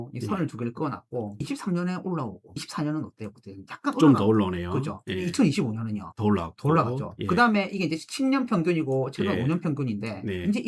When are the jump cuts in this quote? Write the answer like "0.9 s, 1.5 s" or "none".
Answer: 1.4 s